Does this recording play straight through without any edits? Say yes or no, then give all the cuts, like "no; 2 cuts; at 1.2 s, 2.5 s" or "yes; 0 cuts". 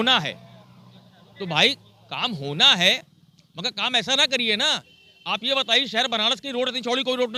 yes; 0 cuts